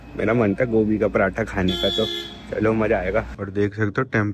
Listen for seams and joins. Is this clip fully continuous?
no; 1 cut; at 3.3 s

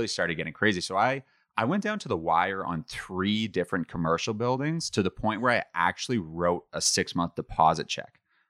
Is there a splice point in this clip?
no; 0 cuts

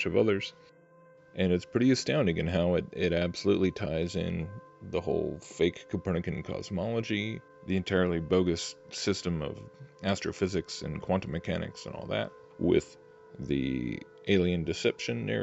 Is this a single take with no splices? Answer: yes; 0 cuts

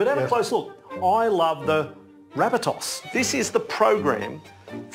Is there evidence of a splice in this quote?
yes; 1 cut; at 2.9 s

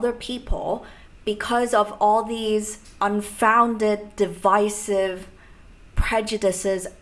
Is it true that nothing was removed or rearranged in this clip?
yes; 0 cuts

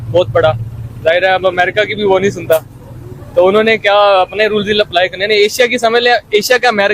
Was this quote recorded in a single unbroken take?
yes; 0 cuts

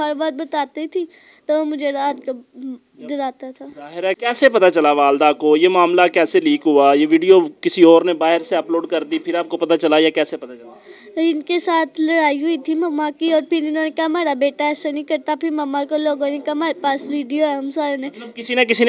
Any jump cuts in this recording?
yes; 1 cut; at 4.2 s

